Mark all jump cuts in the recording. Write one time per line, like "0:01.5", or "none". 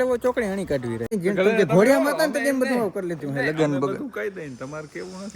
0:01.1